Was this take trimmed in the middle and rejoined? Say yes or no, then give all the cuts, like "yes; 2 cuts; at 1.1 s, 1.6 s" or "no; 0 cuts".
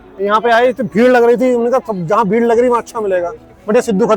no; 0 cuts